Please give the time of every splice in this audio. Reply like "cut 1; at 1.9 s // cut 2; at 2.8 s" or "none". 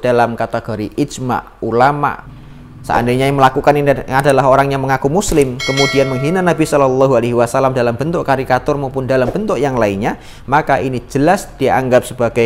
cut 1; at 2.2 s